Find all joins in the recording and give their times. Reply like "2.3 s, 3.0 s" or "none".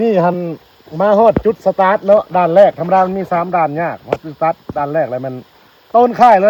none